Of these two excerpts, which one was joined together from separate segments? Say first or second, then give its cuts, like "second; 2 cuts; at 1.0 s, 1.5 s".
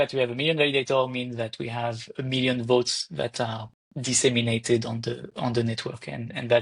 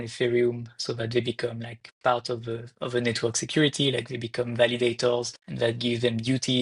second; 1 cut; at 5.4 s